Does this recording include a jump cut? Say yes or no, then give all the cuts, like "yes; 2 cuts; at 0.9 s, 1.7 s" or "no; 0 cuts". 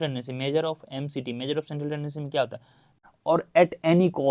yes; 1 cut; at 3.0 s